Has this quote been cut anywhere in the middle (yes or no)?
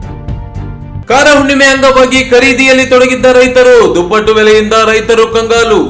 no